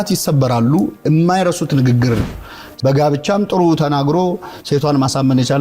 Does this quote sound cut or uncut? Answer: cut